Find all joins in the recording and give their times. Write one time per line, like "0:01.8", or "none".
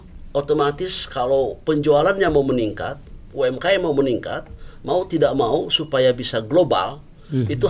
none